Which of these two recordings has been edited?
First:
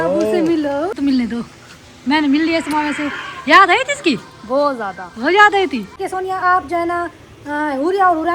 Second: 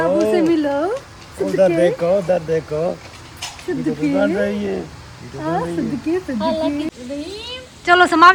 first; 2 cuts; at 0.9 s, 6.0 s

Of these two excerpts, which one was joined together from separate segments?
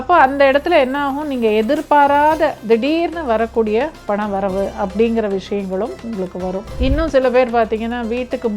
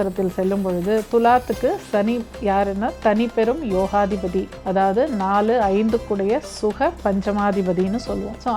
first; 1 cut; at 6.7 s

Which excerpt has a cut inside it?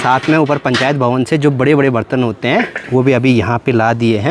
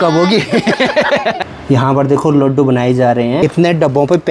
second; 2 cuts; at 1.6 s, 3.4 s

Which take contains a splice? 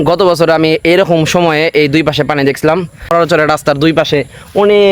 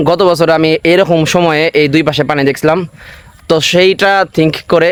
first; 1 cut; at 3.1 s

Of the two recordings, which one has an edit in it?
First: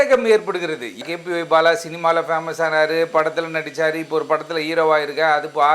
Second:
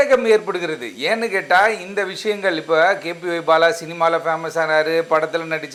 first; 1 cut; at 1.0 s

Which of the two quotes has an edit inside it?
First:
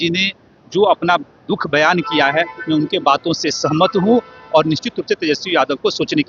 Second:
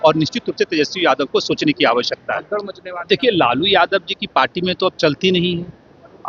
second; 1 cut; at 2.8 s

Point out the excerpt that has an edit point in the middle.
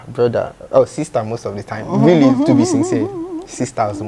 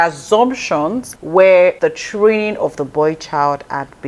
second; 2 cuts; at 1.1 s, 1.8 s

